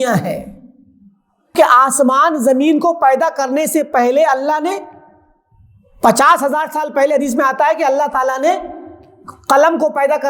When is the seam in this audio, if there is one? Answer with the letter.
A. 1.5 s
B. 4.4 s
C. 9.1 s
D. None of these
A